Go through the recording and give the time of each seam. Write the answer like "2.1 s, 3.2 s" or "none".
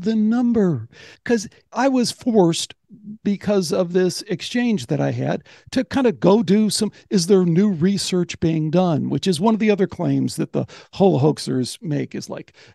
1.2 s